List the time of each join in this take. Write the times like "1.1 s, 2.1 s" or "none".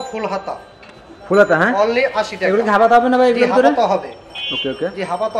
none